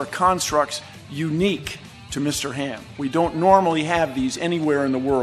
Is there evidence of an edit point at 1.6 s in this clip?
no; 1 cut; at 2.8 s

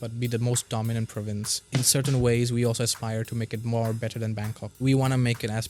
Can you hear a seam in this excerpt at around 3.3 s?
no; 2 cuts; at 1.6 s, 4.8 s

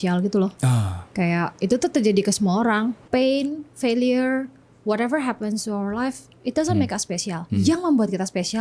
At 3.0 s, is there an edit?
yes; 2 cuts; at 3.0 s, 7.4 s

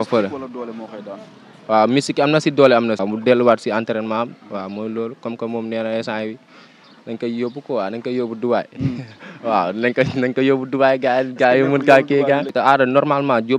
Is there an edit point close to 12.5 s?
yes; 2 cuts; at 3.0 s, 12.5 s

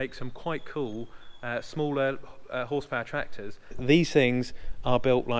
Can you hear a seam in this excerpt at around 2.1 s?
no; 1 cut; at 3.8 s

